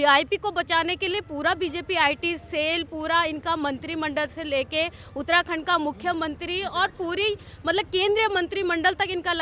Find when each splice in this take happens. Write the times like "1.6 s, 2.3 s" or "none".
none